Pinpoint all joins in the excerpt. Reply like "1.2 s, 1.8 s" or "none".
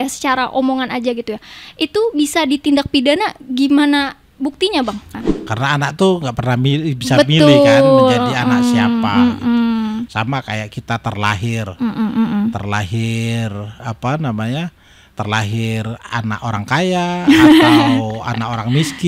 5.1 s

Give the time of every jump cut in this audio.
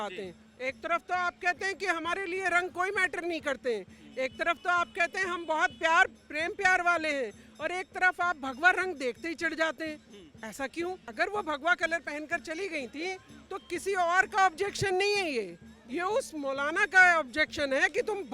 11.1 s

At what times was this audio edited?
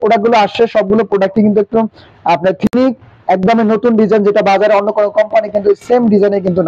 2.7 s

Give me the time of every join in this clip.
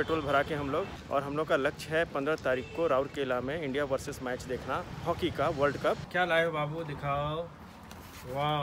1.0 s, 6.0 s

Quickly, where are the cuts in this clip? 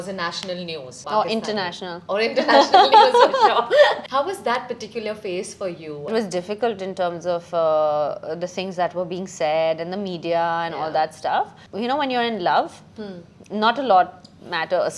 1.0 s, 4.0 s, 6.1 s, 11.6 s

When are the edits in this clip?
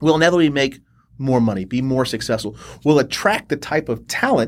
none

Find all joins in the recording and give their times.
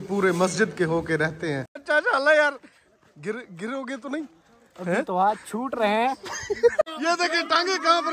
1.8 s, 6.9 s

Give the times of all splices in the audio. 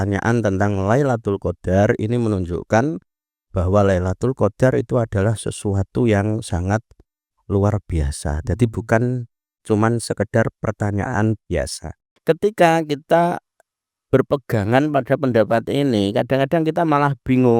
12.0 s

